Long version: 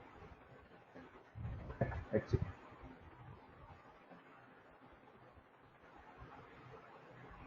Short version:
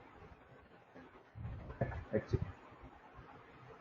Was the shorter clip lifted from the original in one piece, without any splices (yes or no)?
no